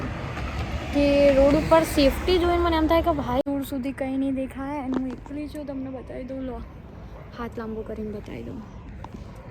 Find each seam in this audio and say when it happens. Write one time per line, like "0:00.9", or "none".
0:03.4